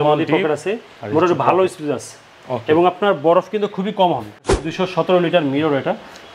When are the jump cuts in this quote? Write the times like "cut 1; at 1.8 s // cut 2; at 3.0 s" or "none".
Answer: cut 1; at 4.6 s